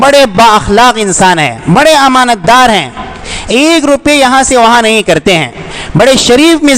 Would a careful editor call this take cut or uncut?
uncut